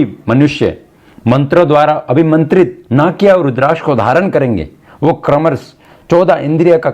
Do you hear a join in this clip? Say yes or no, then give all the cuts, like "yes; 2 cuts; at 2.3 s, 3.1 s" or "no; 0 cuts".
no; 0 cuts